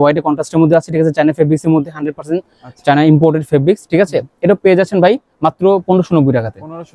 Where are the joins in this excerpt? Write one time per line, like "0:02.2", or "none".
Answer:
none